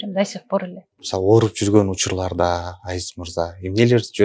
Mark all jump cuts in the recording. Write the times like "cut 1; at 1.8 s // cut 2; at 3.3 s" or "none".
cut 1; at 1.0 s

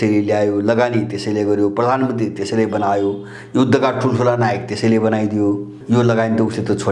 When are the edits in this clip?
cut 1; at 5.8 s

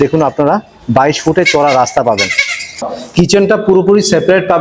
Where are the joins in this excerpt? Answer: cut 1; at 2.9 s

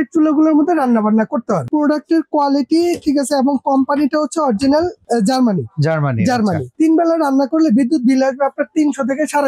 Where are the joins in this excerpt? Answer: cut 1; at 1.6 s // cut 2; at 6.6 s

